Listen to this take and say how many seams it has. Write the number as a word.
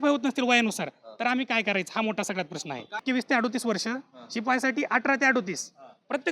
one